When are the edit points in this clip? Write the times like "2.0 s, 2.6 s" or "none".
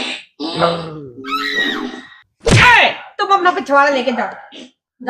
none

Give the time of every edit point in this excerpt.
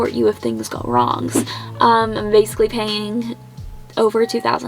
1.4 s

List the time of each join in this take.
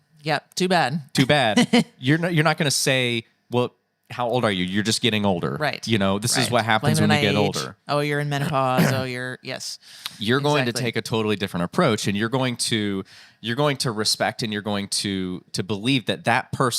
15.5 s

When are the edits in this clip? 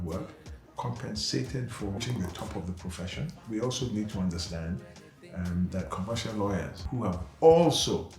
2.0 s, 3.4 s, 6.8 s

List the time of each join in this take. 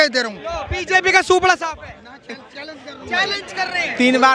none

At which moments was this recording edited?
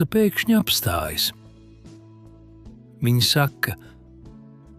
1.2 s, 3.0 s

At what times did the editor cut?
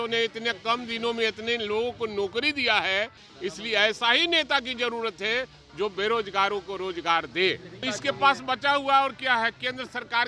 3.2 s, 7.8 s

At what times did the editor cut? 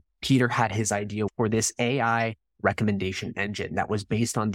1.3 s

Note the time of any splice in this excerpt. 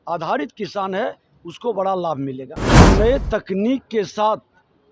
2.9 s

